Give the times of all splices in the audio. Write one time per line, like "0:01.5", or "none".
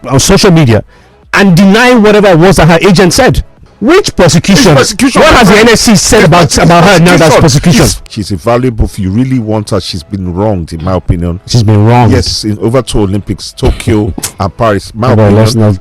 0:03.7
0:08.0